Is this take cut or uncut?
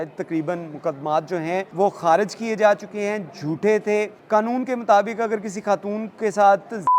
cut